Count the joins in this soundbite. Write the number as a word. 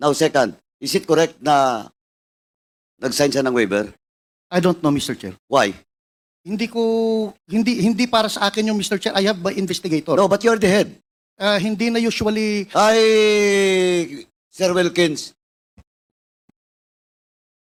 zero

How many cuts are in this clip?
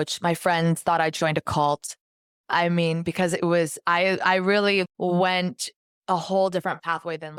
zero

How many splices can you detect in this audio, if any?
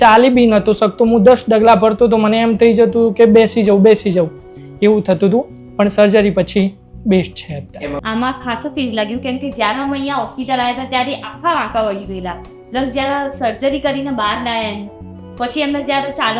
one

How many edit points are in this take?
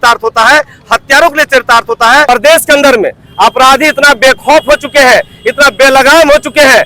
one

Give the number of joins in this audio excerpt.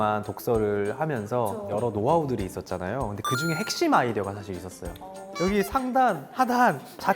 two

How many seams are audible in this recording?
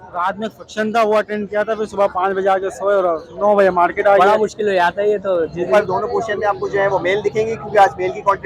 one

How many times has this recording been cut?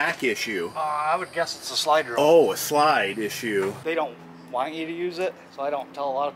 two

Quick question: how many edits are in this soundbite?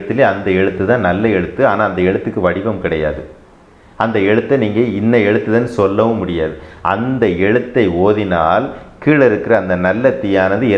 zero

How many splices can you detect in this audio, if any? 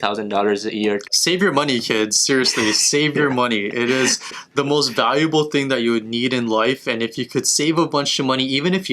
one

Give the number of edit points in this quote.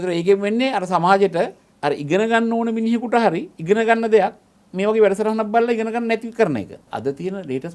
three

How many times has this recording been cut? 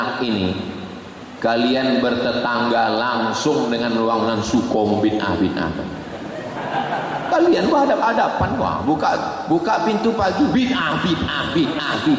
one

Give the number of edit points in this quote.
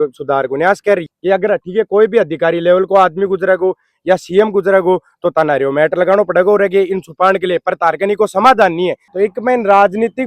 two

